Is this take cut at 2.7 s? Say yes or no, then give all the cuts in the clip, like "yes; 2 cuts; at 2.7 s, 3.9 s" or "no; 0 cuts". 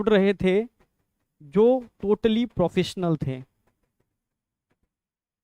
no; 0 cuts